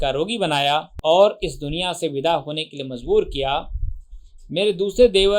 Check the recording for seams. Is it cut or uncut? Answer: cut